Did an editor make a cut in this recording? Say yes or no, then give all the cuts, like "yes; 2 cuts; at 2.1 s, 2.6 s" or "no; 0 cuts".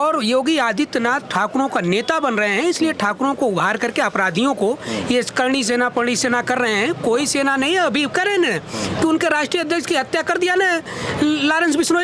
no; 0 cuts